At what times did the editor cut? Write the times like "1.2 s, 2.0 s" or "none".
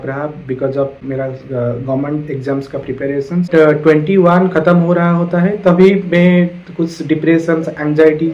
1.0 s, 3.4 s